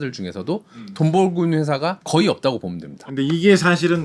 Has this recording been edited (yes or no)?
yes